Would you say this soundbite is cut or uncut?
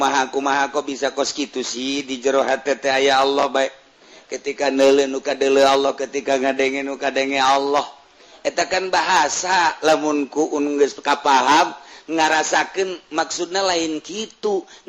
uncut